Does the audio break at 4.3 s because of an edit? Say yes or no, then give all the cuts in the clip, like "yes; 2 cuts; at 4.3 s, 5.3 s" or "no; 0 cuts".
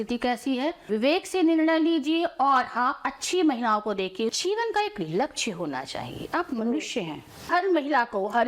yes; 3 cuts; at 0.9 s, 4.3 s, 7.5 s